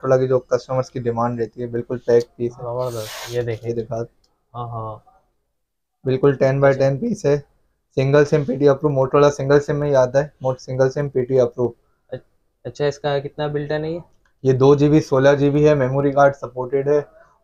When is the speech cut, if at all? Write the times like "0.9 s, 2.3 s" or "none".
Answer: none